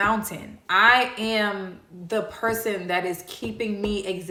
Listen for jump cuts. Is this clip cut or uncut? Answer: uncut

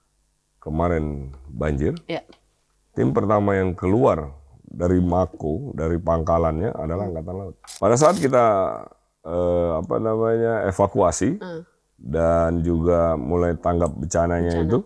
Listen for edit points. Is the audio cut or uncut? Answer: cut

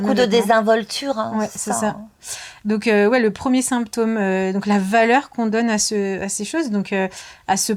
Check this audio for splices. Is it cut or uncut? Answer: uncut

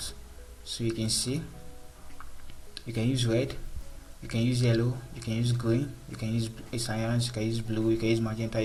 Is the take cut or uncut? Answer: uncut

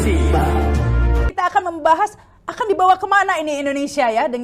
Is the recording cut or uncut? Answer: uncut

